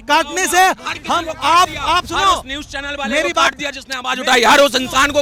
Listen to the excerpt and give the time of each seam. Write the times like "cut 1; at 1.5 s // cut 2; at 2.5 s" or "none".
none